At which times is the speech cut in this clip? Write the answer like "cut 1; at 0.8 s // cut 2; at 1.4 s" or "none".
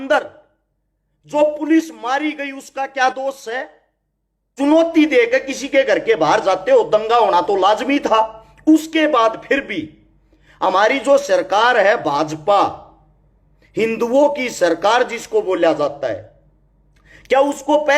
cut 1; at 4.5 s